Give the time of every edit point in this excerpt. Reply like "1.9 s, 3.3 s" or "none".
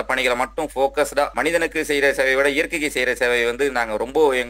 1.3 s